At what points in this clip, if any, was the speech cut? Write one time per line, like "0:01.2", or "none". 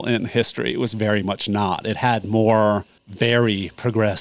0:03.0